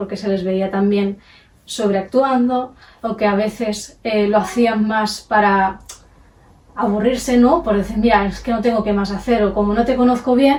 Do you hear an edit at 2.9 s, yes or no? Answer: no